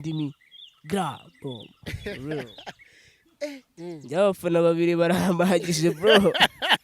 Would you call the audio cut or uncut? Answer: cut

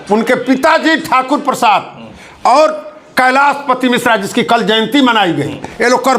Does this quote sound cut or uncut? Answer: uncut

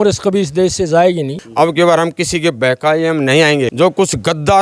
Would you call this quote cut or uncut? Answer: cut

